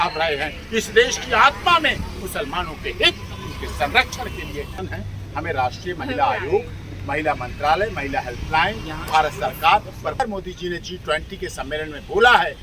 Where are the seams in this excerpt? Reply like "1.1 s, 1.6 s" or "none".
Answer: 4.7 s, 10.2 s

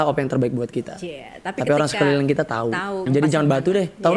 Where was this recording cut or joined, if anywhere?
3.0 s

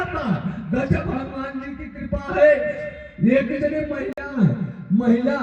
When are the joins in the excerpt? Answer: none

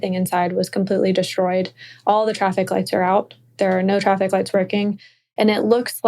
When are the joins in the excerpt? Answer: none

